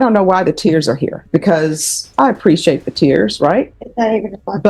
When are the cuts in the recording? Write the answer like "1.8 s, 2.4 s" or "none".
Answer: 1.2 s, 2.1 s, 3.8 s